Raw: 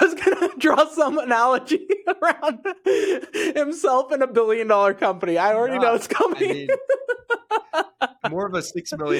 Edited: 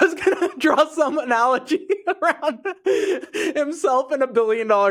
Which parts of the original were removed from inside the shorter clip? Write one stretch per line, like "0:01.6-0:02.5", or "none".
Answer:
none